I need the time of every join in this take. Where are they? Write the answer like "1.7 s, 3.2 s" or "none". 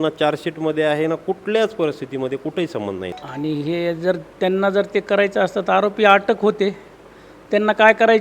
3.1 s

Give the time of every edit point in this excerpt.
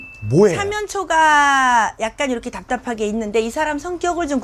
none

